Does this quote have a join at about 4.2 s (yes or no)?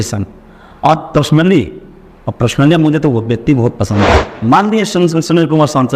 yes